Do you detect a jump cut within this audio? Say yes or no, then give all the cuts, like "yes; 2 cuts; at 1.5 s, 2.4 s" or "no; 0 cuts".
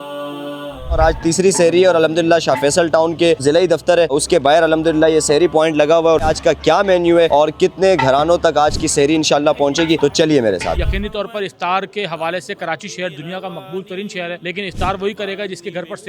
no; 0 cuts